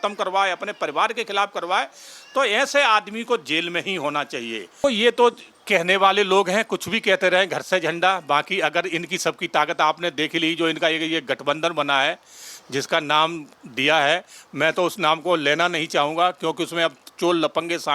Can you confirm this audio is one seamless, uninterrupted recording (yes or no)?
no